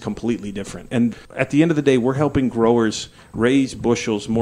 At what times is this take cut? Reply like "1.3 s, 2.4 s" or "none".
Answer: 1.1 s